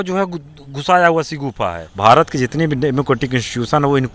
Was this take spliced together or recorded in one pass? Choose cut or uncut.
cut